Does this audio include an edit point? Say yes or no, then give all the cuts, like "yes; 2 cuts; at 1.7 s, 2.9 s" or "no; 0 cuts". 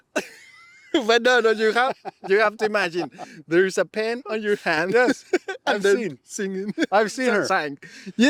no; 0 cuts